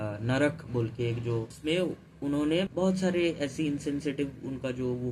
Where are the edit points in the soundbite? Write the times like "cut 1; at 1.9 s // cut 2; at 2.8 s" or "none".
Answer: cut 1; at 1.5 s // cut 2; at 2.7 s

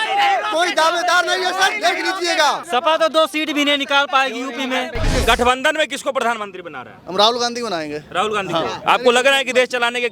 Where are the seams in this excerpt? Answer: cut 1; at 2.6 s // cut 2; at 5.1 s

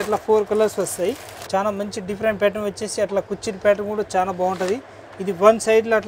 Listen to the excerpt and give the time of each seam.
cut 1; at 1.3 s

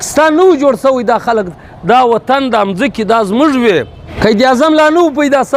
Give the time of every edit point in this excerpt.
cut 1; at 4.0 s

